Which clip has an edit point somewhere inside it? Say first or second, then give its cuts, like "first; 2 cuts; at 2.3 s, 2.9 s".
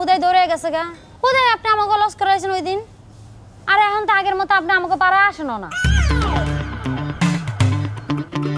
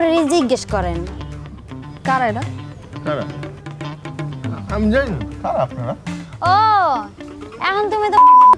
first; 1 cut; at 5.9 s